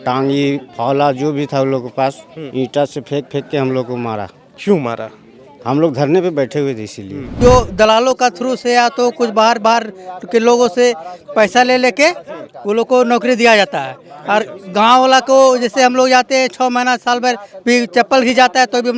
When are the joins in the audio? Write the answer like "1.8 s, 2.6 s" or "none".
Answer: 7.2 s